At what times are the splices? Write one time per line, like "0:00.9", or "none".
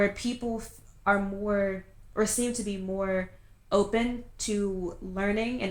none